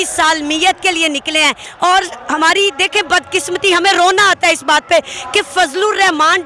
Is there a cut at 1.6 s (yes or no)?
yes